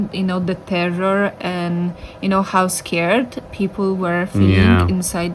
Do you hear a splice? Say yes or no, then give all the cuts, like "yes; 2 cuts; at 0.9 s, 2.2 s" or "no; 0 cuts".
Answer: no; 0 cuts